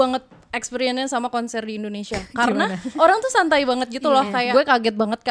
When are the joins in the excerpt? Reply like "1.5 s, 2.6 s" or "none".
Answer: 2.9 s, 4.5 s